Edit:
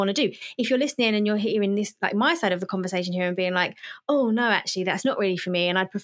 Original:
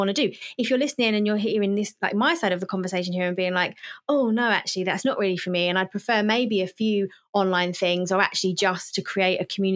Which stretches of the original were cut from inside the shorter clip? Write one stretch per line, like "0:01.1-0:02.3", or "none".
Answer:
none

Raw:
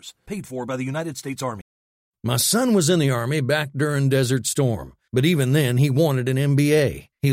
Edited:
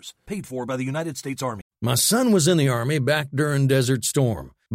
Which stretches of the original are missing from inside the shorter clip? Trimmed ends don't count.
0:01.7-0:02.1

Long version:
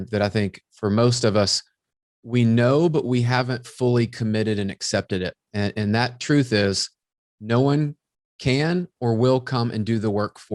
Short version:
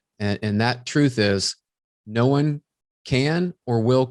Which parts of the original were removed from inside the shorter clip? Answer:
none

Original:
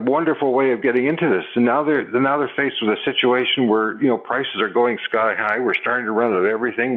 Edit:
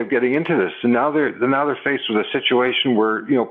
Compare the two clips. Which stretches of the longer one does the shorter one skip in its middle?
none

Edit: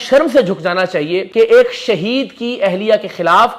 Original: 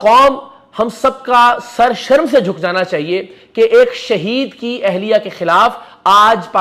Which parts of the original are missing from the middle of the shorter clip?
0:03.2-0:03.4

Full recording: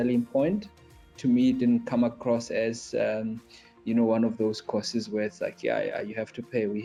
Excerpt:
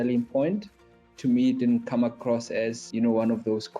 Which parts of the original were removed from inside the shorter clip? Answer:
0:02.8-0:03.7

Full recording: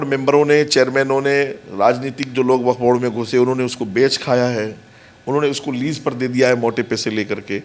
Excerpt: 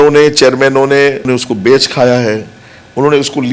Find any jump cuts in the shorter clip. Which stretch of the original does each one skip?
0:01.6-0:03.6

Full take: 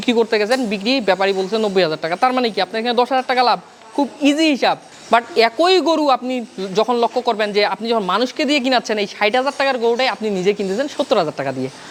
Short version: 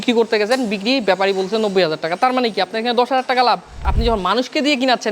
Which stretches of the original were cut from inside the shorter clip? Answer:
0:03.9-0:07.7

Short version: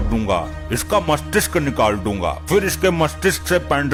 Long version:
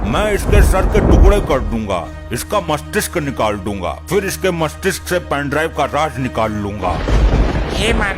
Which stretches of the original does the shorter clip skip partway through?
none

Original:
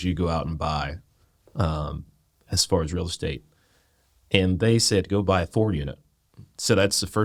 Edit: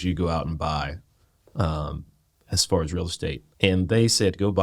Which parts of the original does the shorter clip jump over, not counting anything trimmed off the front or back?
0:03.4-0:04.2

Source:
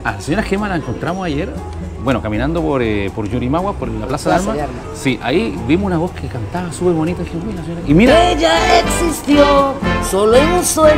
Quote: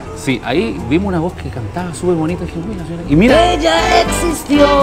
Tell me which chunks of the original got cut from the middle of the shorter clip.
none

